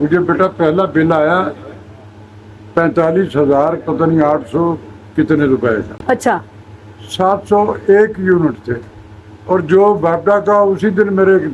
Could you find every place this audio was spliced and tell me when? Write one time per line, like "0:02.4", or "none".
none